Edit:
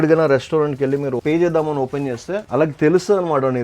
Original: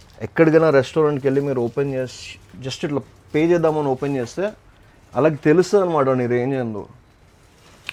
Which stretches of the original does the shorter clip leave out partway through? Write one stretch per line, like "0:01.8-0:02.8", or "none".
0:01.6-0:03.3
0:04.5-0:05.1